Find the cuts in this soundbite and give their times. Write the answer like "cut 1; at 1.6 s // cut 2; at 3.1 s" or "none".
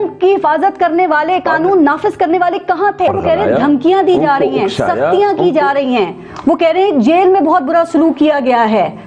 cut 1; at 3.2 s